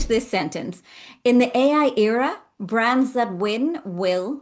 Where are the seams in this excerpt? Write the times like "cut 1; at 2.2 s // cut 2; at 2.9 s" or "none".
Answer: none